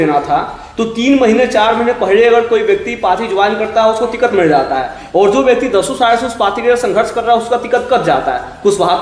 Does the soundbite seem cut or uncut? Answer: uncut